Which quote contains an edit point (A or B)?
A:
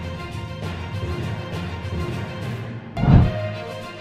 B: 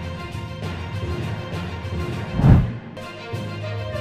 A